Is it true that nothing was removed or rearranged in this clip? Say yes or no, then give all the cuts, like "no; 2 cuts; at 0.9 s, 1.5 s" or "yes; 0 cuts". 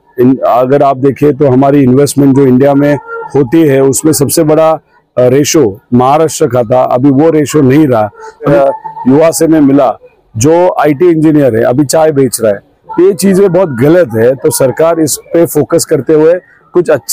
no; 1 cut; at 8.5 s